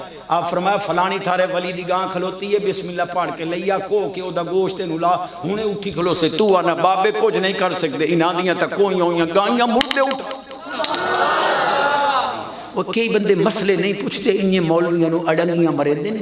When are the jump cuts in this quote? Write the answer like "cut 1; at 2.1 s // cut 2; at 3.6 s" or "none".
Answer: cut 1; at 12.6 s